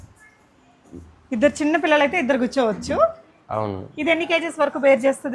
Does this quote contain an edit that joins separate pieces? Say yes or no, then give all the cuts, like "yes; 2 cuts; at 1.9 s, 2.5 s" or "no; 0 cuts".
no; 0 cuts